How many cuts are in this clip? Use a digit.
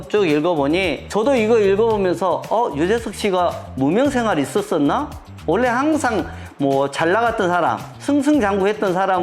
1